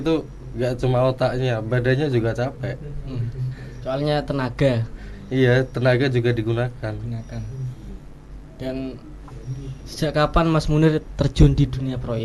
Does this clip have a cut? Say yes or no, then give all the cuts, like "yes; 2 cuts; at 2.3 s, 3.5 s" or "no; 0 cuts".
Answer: no; 0 cuts